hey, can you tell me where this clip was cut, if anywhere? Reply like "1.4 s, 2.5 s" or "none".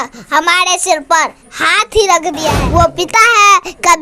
2.6 s